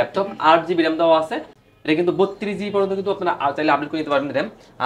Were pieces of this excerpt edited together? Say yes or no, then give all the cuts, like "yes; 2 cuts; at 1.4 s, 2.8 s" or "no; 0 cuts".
no; 0 cuts